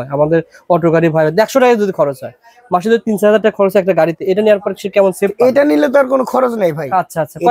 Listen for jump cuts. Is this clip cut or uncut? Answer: uncut